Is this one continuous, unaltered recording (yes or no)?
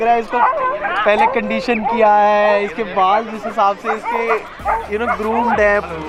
yes